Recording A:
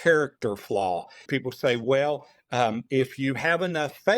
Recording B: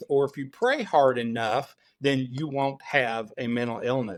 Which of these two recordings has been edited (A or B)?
A